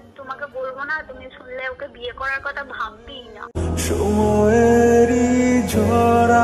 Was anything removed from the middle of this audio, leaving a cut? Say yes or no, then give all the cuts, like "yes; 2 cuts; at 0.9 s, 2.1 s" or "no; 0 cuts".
no; 0 cuts